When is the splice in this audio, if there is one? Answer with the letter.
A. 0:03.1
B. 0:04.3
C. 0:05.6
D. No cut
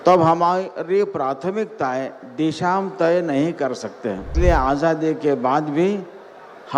B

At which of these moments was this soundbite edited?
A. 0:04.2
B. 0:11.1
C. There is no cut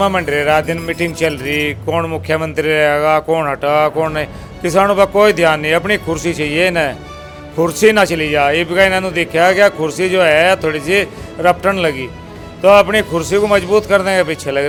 C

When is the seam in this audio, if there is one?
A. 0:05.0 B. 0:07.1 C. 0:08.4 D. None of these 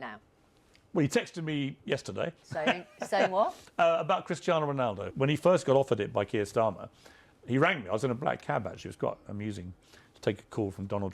A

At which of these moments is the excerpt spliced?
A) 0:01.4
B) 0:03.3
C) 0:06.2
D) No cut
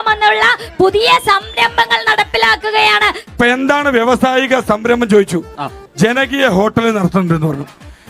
B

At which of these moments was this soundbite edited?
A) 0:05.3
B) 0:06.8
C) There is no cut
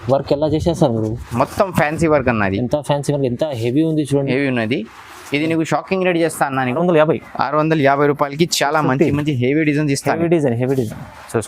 B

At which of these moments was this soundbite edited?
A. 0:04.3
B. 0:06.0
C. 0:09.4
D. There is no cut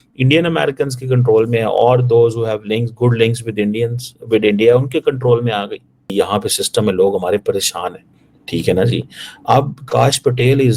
B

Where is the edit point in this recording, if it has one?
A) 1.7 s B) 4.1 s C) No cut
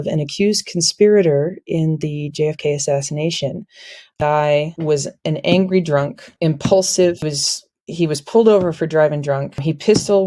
B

